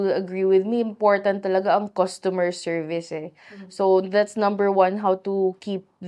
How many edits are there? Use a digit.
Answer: 0